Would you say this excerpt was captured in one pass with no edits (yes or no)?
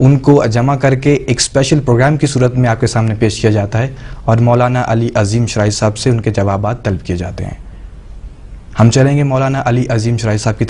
no